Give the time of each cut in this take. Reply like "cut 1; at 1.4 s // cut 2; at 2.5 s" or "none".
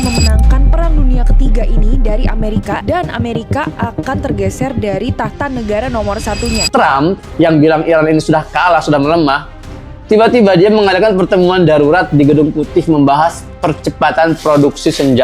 cut 1; at 6.6 s